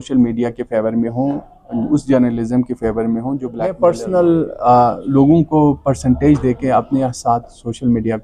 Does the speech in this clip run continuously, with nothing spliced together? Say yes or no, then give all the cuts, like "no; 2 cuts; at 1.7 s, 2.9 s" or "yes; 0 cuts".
no; 1 cut; at 3.8 s